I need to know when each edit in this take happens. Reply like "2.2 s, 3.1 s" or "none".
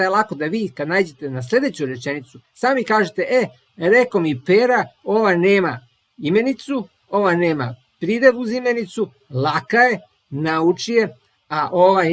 none